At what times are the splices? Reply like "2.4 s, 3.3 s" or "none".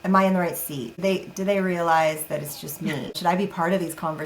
0.9 s, 3.2 s